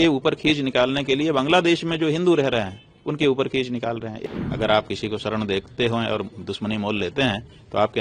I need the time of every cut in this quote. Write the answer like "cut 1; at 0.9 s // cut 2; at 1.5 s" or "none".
cut 1; at 4.2 s